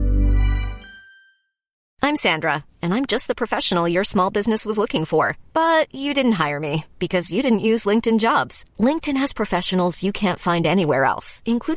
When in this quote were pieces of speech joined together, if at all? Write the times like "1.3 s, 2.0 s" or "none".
1.8 s